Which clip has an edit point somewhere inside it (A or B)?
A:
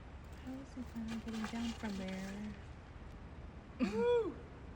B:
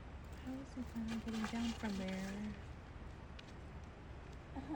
A